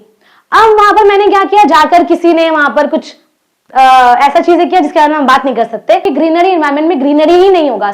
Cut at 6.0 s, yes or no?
yes